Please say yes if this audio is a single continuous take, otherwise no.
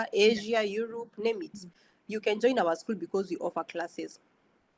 yes